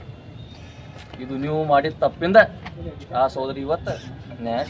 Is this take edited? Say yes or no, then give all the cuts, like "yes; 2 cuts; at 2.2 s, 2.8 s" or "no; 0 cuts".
no; 0 cuts